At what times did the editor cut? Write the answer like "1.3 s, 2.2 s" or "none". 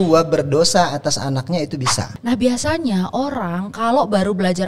2.0 s